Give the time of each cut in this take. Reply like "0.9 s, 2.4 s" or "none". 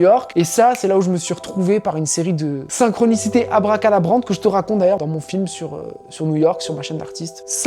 2.6 s, 5.0 s